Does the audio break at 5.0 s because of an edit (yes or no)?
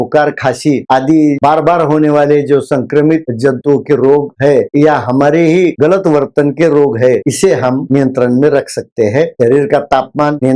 no